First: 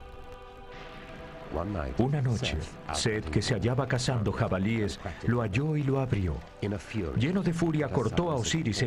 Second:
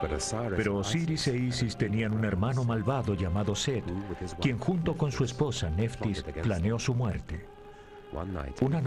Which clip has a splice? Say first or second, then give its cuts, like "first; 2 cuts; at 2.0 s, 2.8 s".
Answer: first; 1 cut; at 7.4 s